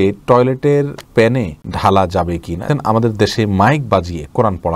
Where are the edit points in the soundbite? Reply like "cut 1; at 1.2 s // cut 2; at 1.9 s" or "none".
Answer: cut 1; at 1.2 s // cut 2; at 2.7 s